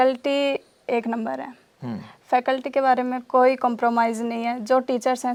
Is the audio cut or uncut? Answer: uncut